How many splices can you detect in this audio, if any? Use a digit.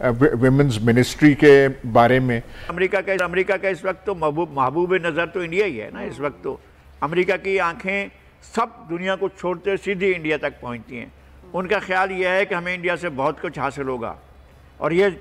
1